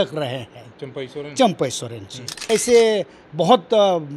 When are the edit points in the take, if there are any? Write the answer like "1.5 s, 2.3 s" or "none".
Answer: 2.5 s